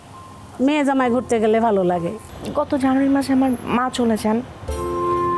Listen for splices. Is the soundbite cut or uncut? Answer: cut